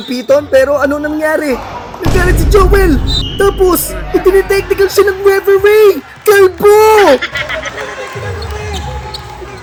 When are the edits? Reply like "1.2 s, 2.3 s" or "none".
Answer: none